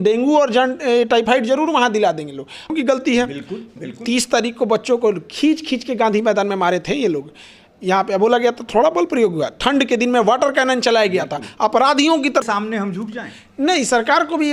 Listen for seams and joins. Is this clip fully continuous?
no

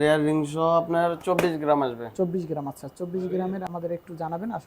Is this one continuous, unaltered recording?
no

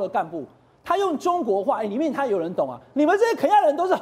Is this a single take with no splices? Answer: yes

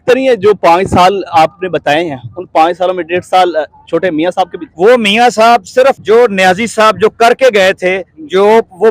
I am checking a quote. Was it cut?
yes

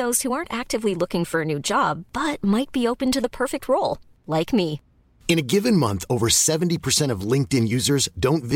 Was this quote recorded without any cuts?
yes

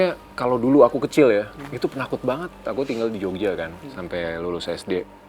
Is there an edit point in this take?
yes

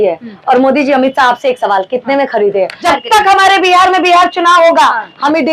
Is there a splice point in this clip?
yes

